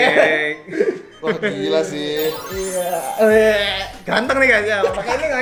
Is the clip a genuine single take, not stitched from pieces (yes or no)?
yes